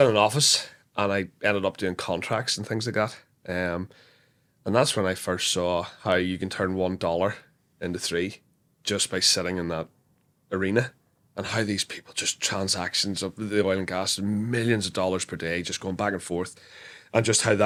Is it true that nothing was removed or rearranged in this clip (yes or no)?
yes